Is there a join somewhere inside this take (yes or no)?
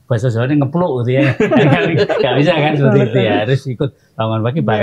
no